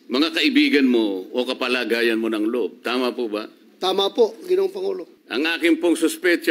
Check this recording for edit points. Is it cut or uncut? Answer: cut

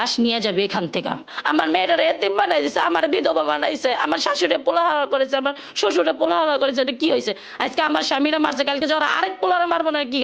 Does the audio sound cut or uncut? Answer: cut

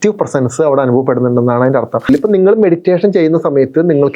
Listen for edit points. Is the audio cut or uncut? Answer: cut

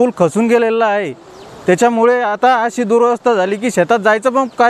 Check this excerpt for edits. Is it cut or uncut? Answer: uncut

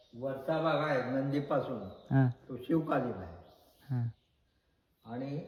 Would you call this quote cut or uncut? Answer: uncut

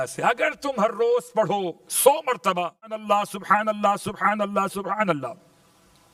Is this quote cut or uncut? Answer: uncut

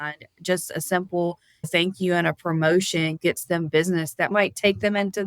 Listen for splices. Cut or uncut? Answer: cut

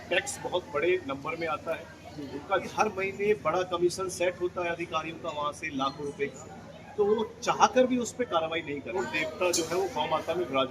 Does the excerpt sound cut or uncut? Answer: cut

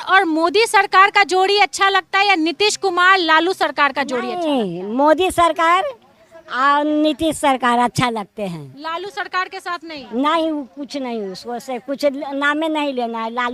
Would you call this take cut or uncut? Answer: uncut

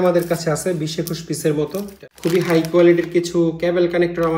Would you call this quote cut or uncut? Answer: cut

